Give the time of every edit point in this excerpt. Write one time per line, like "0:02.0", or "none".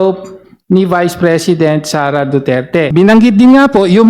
0:02.9